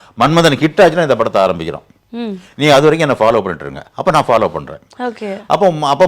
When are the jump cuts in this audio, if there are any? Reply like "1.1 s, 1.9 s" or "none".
none